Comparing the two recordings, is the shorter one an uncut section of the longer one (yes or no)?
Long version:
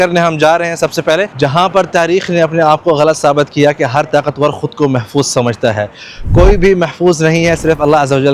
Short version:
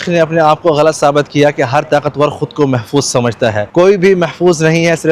no